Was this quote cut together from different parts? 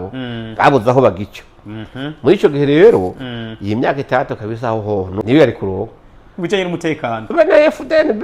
yes; 1 cut; at 5.1 s

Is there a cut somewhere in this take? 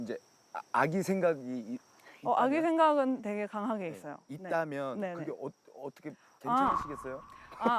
no; 0 cuts

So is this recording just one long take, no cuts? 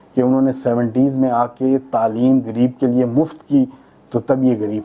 yes; 0 cuts

